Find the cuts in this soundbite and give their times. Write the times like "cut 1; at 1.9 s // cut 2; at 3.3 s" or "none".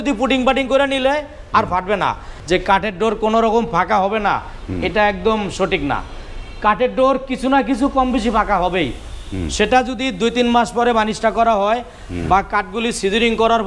cut 1; at 2.3 s